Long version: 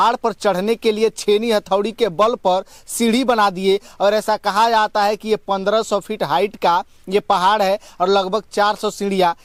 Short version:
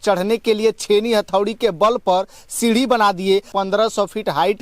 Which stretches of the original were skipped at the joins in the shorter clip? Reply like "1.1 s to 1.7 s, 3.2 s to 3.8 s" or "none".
3.9 s to 5.4 s